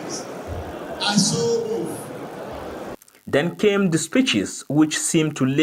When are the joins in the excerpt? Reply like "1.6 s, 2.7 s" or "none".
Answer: 3.1 s

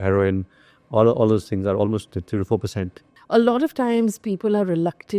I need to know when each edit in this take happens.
3.1 s

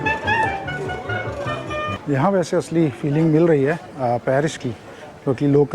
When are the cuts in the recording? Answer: 2.0 s

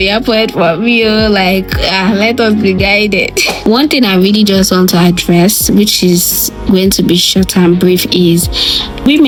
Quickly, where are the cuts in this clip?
none

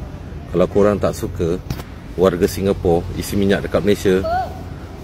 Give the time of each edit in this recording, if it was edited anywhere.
none

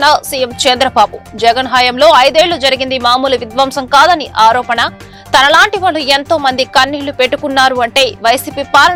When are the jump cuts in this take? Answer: none

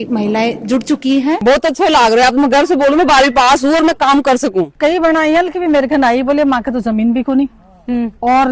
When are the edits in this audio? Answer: 1.4 s, 4.7 s

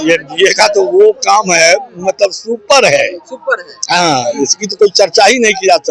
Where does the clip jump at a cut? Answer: none

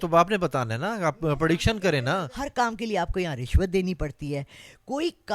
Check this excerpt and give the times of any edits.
2.4 s

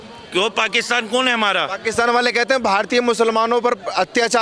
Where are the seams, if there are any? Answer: none

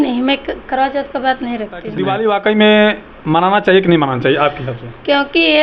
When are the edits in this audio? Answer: 1.9 s

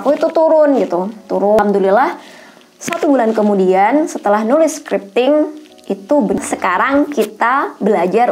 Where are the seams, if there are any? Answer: 1.6 s, 6.4 s

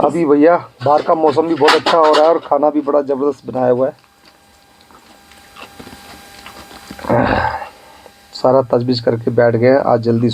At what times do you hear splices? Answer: none

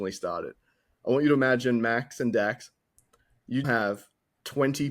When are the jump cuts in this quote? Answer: 3.6 s

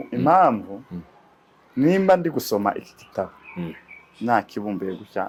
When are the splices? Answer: none

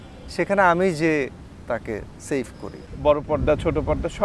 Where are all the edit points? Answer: 2.8 s

